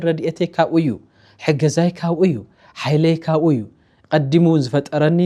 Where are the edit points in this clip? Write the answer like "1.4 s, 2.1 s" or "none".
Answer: none